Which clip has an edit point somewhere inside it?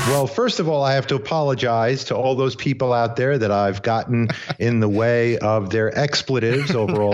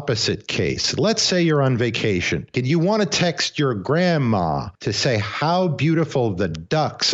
second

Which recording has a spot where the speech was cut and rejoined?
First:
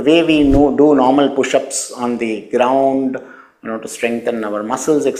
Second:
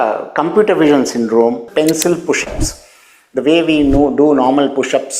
second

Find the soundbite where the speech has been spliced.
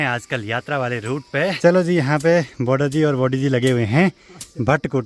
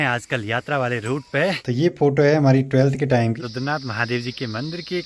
second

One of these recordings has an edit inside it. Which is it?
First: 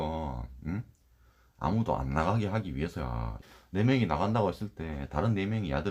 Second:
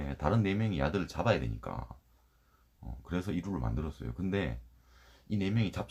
first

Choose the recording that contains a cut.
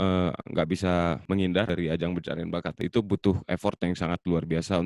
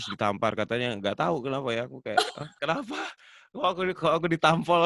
first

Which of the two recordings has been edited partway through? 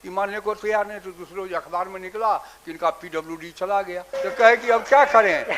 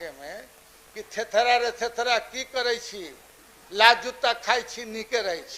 first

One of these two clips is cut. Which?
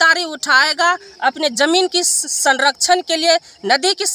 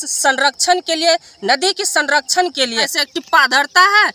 second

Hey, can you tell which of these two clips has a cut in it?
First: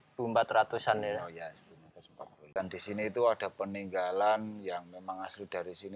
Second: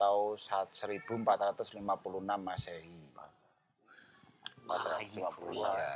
first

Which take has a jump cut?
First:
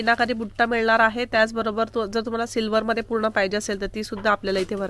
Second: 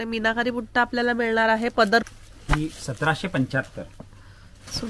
second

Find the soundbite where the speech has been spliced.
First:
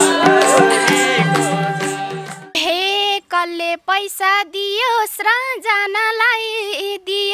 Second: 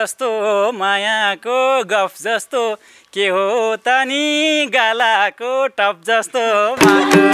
first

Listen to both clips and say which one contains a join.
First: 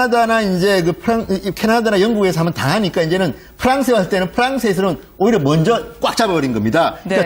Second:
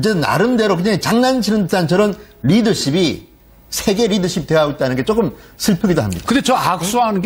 first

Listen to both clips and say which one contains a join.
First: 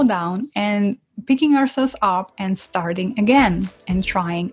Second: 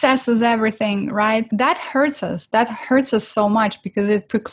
second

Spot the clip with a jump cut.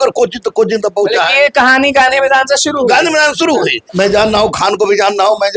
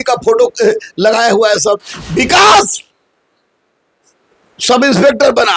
first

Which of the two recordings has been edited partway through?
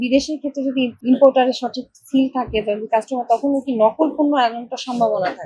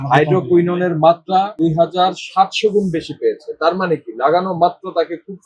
second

